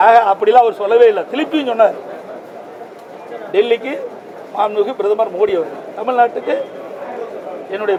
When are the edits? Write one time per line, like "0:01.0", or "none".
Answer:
none